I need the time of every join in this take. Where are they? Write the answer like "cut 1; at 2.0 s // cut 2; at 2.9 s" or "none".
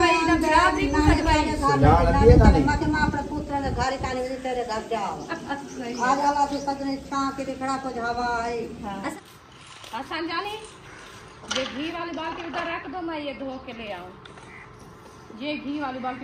cut 1; at 9.1 s